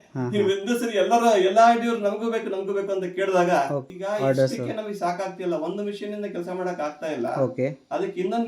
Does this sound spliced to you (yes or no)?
yes